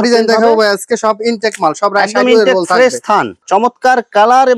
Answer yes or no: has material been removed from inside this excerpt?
yes